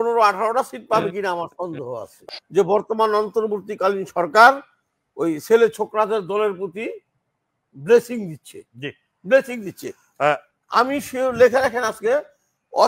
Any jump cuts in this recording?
yes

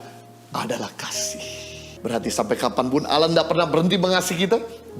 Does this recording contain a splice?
yes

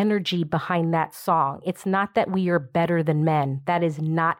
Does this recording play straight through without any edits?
yes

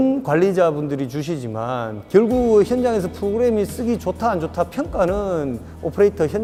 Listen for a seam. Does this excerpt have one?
no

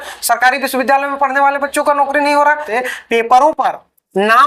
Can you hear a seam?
yes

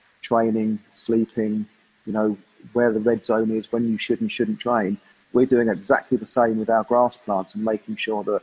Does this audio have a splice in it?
no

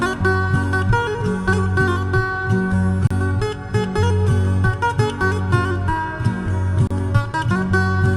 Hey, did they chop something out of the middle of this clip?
no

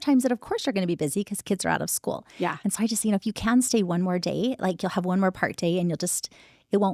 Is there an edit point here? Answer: no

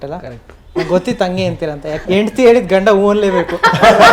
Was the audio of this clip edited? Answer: yes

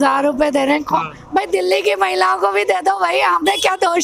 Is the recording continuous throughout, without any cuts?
yes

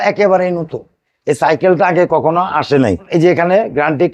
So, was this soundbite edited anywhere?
yes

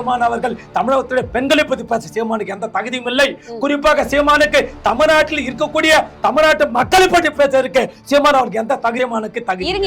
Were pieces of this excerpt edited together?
yes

